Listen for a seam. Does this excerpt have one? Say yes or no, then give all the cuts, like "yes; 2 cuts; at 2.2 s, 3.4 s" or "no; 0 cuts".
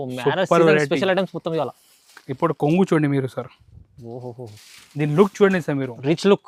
no; 0 cuts